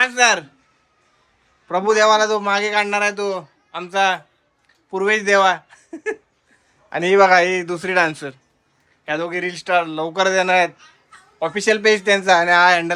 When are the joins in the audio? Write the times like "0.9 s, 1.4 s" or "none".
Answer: none